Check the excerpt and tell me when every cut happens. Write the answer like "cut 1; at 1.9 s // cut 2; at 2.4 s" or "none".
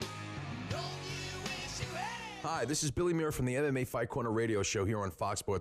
cut 1; at 2.3 s